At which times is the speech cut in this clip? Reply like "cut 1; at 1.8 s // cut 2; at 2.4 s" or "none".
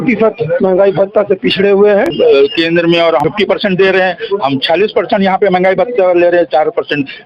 cut 1; at 2.1 s // cut 2; at 3.2 s